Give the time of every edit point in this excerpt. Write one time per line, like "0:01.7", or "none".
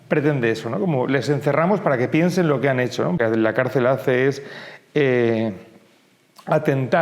0:03.2